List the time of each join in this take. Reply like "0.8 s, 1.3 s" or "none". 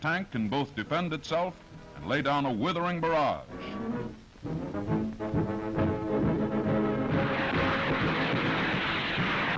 1.9 s